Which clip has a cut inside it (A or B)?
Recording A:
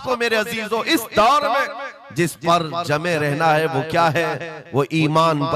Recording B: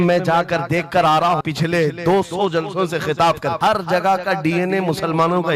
B